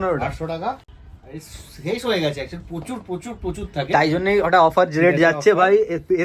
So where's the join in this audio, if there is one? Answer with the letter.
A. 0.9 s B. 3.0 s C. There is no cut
C